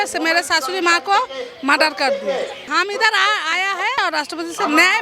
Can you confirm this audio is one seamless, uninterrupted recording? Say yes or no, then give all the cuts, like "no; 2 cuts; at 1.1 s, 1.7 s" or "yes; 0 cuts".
no; 2 cuts; at 2.7 s, 4.0 s